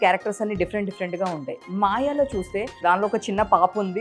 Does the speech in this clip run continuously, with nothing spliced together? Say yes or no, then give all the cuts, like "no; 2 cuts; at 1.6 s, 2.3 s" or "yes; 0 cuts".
no; 1 cut; at 2.8 s